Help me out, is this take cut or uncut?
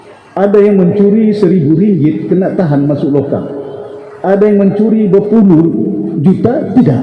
uncut